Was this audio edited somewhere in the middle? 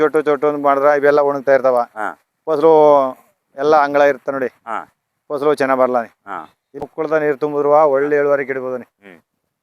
yes; 1 cut; at 6.8 s

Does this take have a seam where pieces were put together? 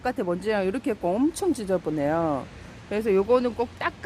no; 0 cuts

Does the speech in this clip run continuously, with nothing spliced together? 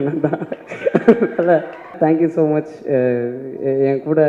no; 1 cut; at 1.9 s

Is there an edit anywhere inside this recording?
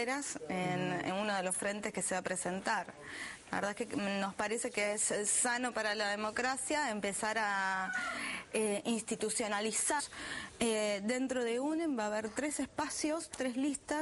no; 0 cuts

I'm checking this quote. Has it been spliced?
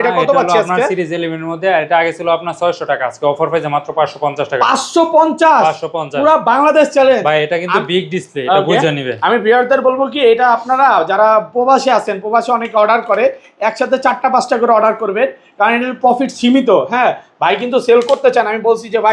no; 0 cuts

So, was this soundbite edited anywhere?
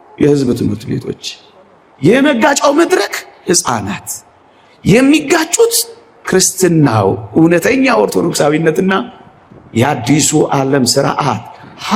no; 0 cuts

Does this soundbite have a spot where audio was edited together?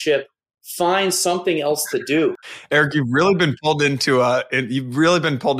yes; 1 cut; at 2.8 s

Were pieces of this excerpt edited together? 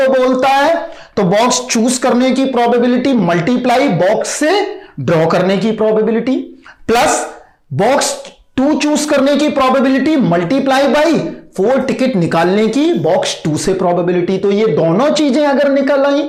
no; 0 cuts

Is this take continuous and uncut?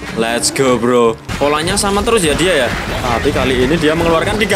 no; 2 cuts; at 1.3 s, 2.9 s

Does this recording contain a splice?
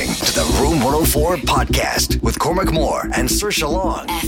no; 0 cuts

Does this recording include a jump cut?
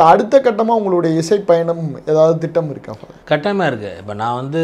no; 0 cuts

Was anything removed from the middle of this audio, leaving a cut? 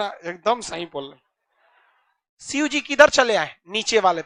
no; 0 cuts

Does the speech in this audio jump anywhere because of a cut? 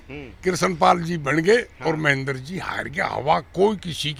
no; 0 cuts

